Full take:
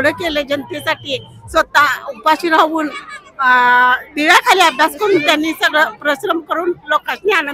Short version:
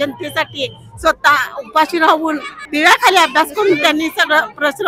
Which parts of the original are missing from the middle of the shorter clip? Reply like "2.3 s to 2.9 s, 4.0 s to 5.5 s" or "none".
3.1 s to 4.1 s

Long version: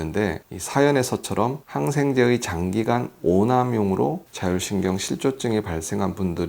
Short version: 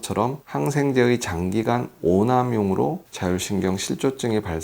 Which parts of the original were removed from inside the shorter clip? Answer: none

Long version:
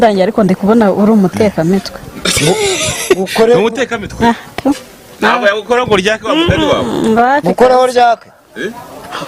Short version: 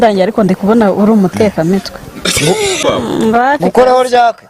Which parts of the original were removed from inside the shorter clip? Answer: 2.8 s to 6.7 s

